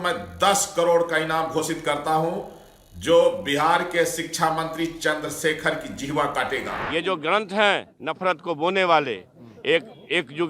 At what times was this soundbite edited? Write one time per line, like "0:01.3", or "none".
0:06.8

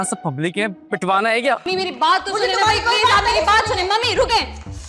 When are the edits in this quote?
0:01.7

